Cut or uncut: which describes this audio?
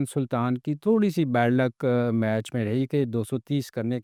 uncut